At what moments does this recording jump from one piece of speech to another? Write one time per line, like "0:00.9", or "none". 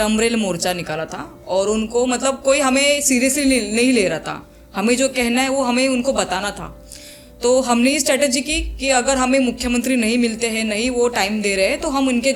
none